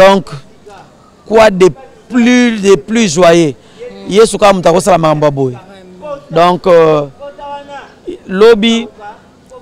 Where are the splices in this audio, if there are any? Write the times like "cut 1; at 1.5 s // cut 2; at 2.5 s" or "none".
none